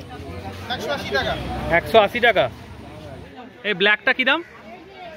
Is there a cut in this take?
no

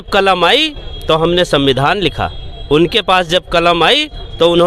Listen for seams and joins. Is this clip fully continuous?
yes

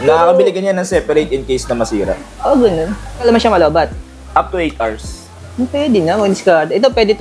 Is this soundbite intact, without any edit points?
no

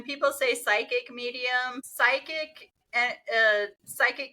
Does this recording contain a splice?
yes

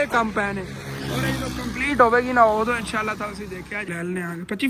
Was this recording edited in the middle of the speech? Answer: yes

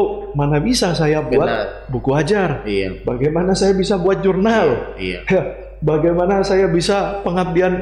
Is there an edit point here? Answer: no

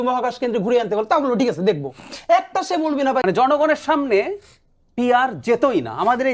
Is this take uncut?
no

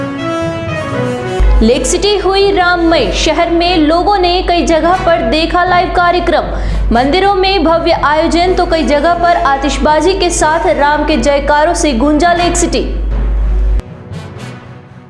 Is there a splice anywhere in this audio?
yes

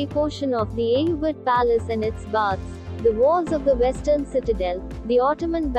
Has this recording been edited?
no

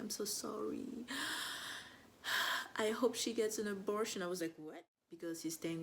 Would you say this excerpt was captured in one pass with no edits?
no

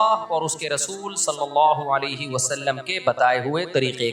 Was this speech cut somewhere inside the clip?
no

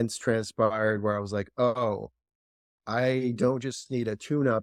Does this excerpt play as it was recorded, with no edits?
yes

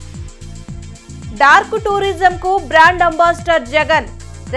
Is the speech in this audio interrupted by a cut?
yes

